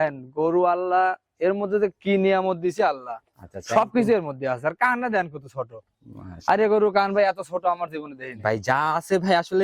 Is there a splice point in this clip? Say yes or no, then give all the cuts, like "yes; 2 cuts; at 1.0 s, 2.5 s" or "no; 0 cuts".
no; 0 cuts